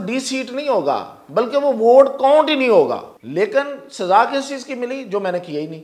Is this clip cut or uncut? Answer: cut